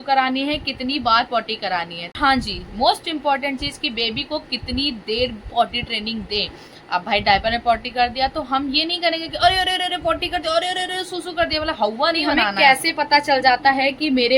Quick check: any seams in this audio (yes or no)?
yes